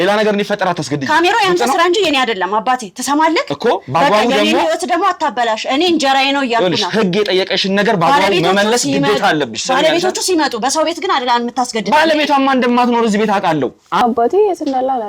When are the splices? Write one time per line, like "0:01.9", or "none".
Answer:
0:14.0